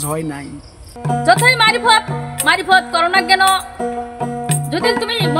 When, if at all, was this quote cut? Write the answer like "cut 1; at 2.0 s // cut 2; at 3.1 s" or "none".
cut 1; at 0.9 s